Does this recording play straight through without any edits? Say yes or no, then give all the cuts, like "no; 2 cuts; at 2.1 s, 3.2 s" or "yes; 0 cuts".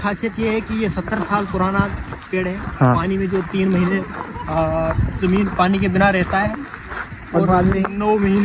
yes; 0 cuts